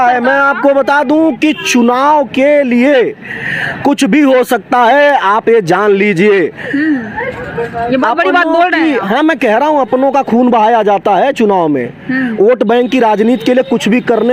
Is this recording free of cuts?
yes; 0 cuts

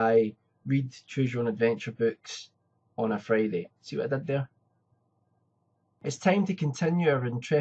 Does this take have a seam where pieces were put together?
no; 0 cuts

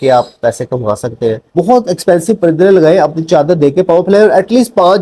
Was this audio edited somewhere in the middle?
yes; 1 cut; at 1.5 s

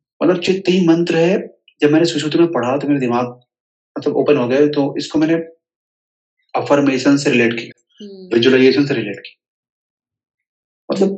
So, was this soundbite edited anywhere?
no; 0 cuts

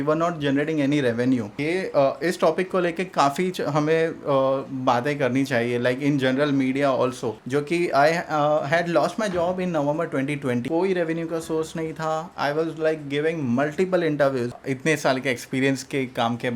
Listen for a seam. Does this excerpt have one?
yes; 4 cuts; at 1.5 s, 7.3 s, 10.7 s, 14.6 s

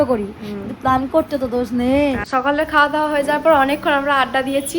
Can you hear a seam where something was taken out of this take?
yes; 1 cut; at 2.2 s

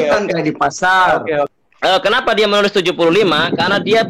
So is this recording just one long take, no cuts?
no; 1 cut; at 1.5 s

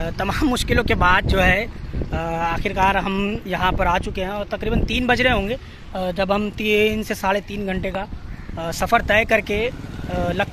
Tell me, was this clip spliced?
no; 0 cuts

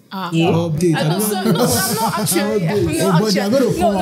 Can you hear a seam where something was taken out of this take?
no; 0 cuts

